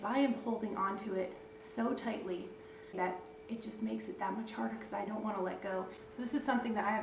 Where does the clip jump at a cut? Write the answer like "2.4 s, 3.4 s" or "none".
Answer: 3.0 s, 6.0 s